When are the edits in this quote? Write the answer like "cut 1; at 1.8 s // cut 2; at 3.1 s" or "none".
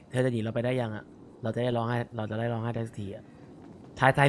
none

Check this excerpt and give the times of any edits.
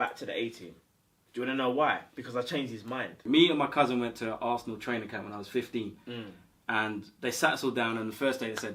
cut 1; at 3.2 s

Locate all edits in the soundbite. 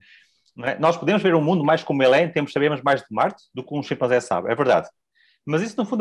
none

